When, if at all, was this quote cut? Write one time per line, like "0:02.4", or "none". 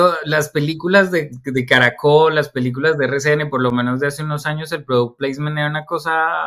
none